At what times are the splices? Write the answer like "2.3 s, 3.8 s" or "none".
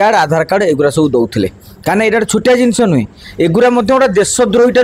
none

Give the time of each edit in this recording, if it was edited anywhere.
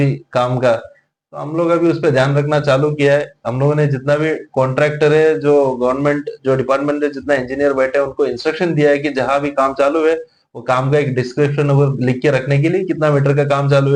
none

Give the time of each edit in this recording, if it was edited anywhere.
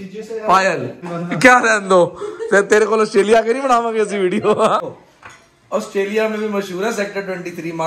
1.1 s, 4.8 s

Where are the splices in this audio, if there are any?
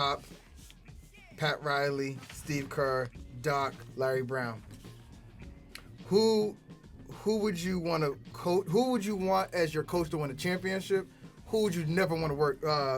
none

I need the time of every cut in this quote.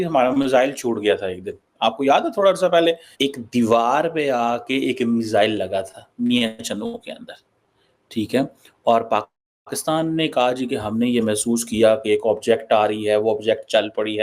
3.1 s

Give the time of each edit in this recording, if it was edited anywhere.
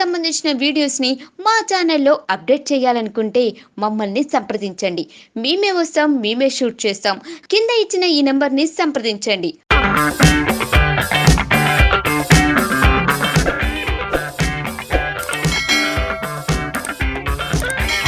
none

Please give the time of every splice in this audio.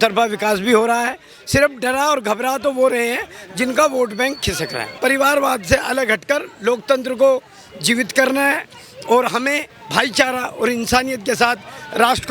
5.0 s, 9.7 s

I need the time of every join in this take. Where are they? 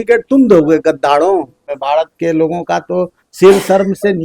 1.5 s

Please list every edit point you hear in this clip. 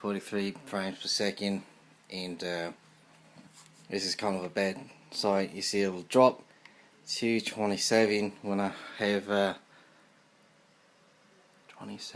7.8 s

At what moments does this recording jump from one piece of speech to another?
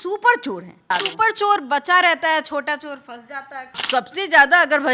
0.9 s, 3.8 s

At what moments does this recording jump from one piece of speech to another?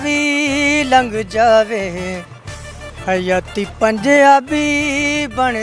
none

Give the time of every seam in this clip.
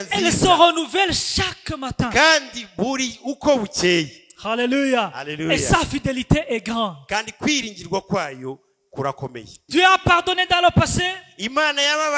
9.5 s

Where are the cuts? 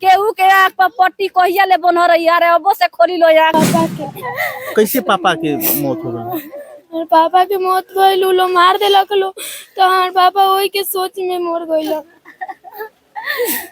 3.5 s

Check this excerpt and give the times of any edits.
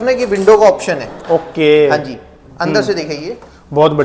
none

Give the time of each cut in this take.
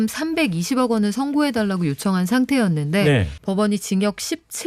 3.3 s

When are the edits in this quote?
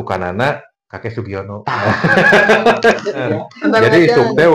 3.3 s

